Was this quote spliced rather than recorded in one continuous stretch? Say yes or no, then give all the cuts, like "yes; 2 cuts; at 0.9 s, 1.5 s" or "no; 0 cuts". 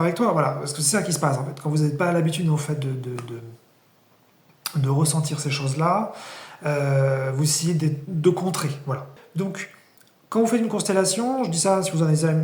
yes; 1 cut; at 9.2 s